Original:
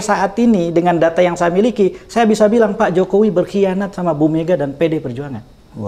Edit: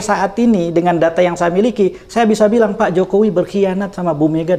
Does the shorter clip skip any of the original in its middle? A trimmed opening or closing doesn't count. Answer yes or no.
no